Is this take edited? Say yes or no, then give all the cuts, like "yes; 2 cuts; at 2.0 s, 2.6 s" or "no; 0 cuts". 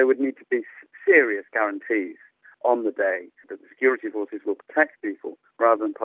no; 0 cuts